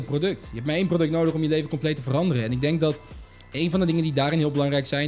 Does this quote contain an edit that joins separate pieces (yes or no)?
no